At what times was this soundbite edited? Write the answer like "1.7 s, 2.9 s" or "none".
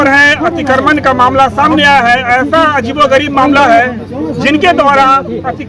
none